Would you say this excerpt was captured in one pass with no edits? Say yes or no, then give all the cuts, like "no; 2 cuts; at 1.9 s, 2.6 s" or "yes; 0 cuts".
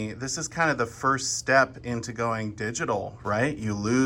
yes; 0 cuts